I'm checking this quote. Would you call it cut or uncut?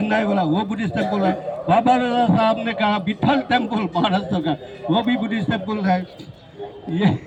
uncut